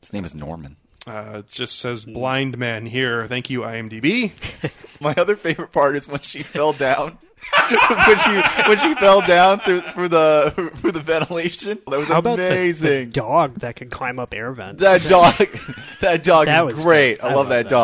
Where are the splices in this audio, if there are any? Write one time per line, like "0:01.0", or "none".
0:04.9
0:11.9